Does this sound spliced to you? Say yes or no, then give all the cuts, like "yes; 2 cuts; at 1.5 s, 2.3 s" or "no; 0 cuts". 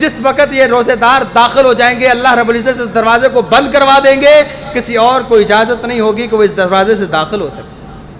no; 0 cuts